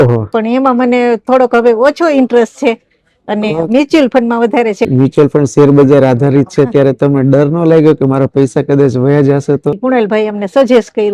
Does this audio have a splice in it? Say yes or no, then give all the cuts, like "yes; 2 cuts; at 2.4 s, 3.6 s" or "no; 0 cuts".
yes; 2 cuts; at 4.9 s, 9.8 s